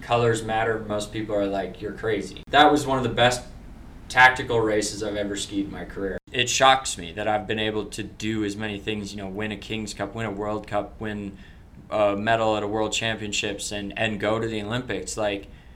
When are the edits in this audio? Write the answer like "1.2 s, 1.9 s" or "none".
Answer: 2.4 s, 6.3 s